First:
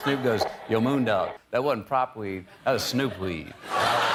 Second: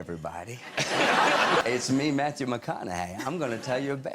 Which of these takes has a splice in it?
second; 1 cut; at 1.6 s

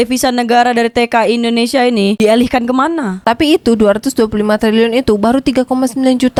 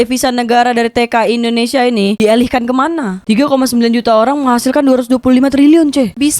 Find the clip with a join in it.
second; 1 cut; at 3.2 s

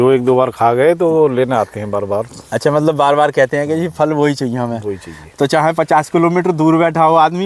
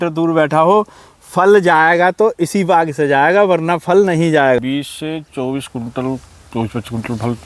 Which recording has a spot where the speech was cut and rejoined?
second; 1 cut; at 4.6 s

